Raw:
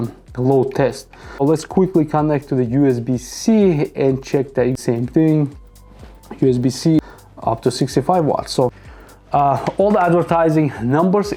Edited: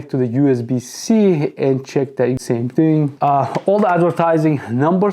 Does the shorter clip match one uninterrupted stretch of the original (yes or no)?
no